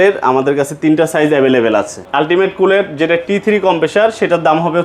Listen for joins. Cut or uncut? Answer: cut